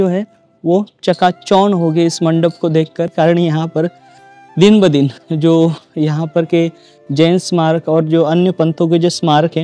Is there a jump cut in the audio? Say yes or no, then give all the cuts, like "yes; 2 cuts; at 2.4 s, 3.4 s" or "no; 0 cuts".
yes; 1 cut; at 3.1 s